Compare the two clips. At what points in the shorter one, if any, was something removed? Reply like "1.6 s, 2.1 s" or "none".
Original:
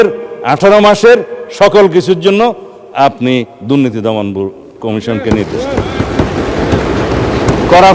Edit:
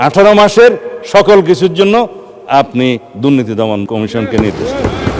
3.8 s